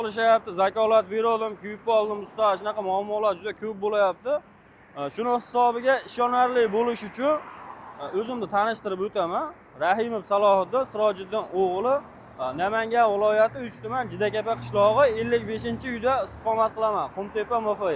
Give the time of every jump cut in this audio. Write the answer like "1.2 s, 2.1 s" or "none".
none